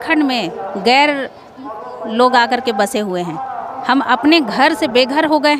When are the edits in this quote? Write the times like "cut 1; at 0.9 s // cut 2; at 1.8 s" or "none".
none